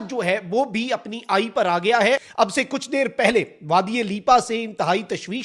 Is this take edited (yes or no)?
yes